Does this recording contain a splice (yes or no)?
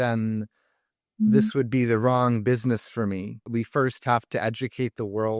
yes